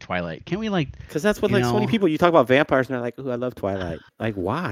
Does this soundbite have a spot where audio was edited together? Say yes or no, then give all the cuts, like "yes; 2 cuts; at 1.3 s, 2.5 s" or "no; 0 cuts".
no; 0 cuts